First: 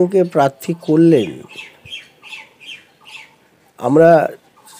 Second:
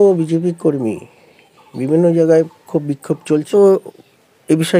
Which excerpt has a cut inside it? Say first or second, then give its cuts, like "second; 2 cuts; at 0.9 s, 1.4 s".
second; 1 cut; at 3.5 s